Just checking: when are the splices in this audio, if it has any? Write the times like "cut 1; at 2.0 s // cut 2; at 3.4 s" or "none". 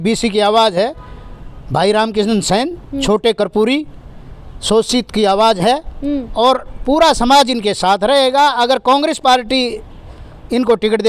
none